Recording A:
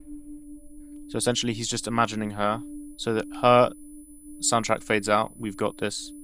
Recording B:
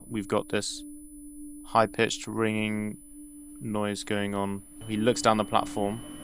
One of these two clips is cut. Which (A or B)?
B